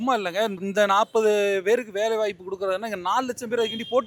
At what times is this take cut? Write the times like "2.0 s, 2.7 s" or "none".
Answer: none